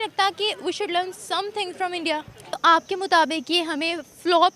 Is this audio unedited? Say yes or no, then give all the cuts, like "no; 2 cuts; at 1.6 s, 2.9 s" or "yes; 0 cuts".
no; 1 cut; at 2.6 s